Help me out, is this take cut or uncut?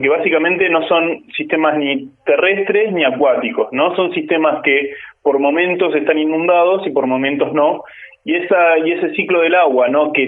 uncut